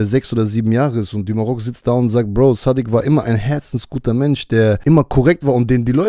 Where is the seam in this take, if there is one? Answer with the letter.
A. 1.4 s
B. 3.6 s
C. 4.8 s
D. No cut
C